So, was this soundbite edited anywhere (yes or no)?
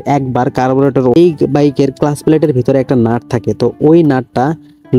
yes